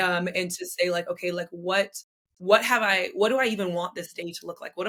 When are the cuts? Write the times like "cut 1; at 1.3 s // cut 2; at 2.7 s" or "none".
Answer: none